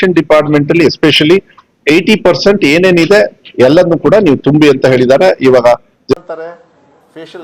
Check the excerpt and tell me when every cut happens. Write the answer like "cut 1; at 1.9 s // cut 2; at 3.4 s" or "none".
cut 1; at 6.1 s